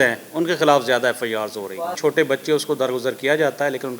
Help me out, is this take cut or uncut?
cut